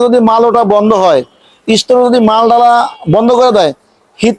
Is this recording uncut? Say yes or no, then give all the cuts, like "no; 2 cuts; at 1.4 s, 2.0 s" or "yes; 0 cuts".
yes; 0 cuts